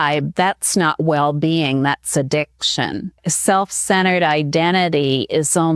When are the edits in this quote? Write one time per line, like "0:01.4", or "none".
0:03.3